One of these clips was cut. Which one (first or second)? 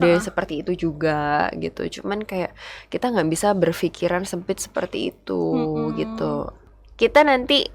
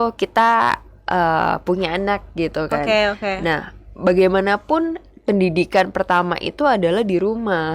first